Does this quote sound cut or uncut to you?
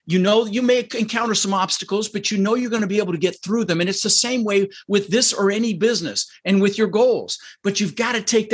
uncut